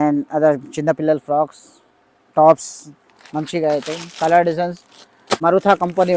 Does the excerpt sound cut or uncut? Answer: cut